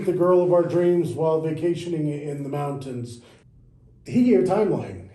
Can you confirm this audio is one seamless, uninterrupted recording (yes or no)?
no